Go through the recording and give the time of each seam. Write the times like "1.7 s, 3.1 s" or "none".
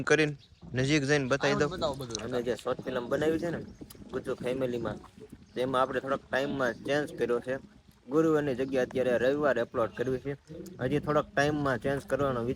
2.1 s